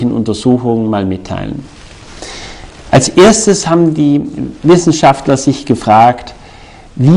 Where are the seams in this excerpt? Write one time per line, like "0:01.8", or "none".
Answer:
0:02.8